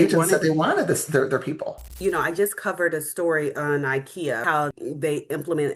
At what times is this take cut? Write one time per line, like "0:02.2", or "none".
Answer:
0:02.0
0:04.5